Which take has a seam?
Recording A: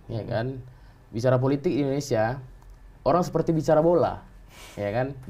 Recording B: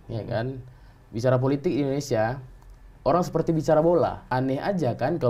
B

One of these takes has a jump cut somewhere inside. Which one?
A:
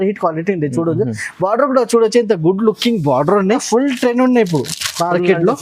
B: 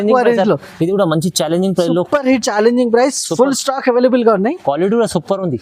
A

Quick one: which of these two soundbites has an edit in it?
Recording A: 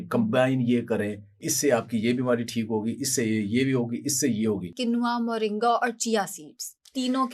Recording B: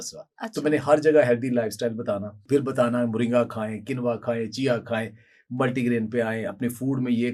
A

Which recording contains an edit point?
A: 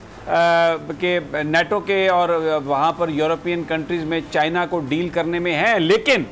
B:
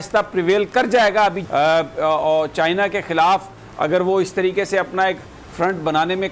B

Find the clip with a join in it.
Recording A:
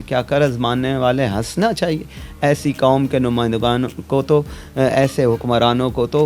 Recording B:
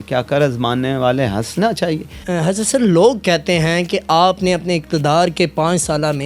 B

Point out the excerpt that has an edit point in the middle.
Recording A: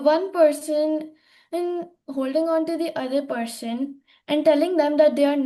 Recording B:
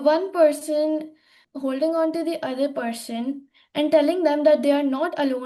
B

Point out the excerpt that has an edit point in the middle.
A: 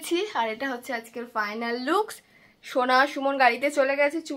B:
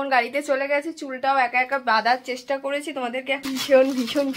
B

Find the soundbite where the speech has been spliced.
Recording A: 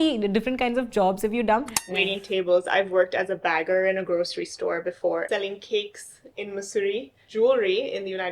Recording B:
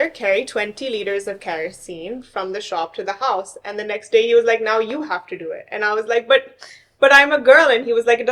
A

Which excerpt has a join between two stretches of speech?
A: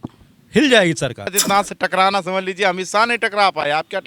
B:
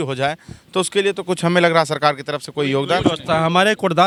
A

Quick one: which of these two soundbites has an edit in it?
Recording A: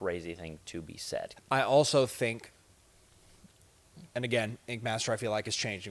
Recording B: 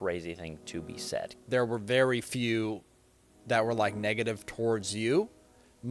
B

